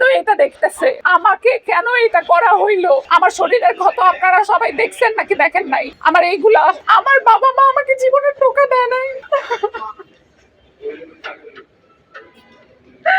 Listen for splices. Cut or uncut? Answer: cut